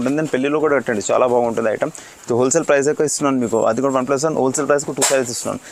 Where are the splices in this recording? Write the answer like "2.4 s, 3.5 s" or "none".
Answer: none